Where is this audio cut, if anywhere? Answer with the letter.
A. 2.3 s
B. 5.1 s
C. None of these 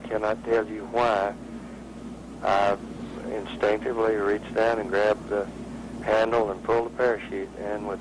C